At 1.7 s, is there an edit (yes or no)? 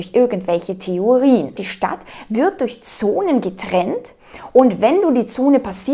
yes